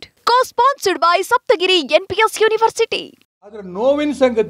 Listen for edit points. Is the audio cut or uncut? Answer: cut